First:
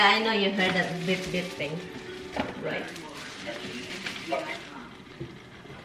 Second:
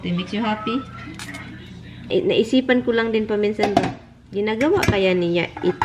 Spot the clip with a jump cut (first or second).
second